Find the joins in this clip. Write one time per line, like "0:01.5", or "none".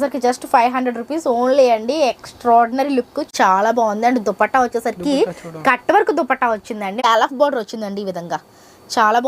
0:03.3
0:07.0